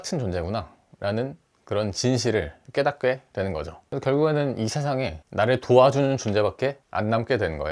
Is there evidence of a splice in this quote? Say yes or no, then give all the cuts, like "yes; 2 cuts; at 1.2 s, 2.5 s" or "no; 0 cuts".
no; 0 cuts